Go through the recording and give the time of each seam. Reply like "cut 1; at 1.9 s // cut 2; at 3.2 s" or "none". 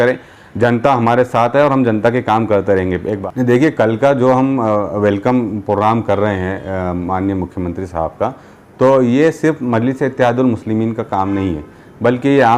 cut 1; at 3.2 s